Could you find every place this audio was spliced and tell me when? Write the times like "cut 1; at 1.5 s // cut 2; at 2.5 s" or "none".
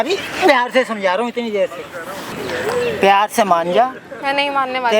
cut 1; at 2.3 s